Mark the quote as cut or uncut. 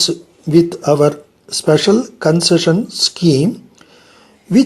uncut